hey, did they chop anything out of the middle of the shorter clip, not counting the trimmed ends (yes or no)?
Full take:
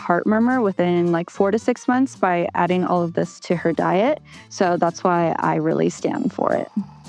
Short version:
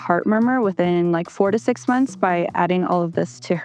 no